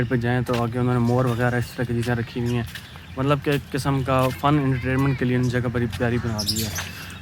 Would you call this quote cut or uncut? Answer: uncut